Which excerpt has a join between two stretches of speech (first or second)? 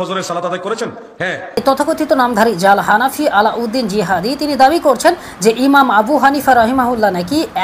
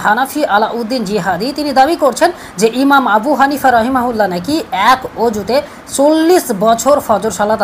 first